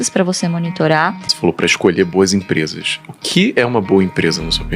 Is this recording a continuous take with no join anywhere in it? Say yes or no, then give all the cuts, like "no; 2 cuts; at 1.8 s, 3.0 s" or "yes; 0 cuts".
no; 1 cut; at 1.3 s